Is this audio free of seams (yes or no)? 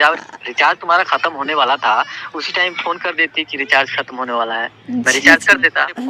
yes